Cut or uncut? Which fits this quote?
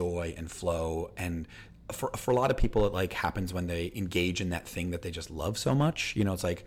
uncut